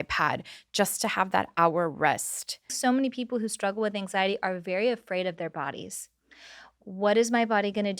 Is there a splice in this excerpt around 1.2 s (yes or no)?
no